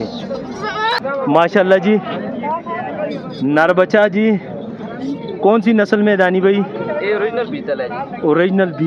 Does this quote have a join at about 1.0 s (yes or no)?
yes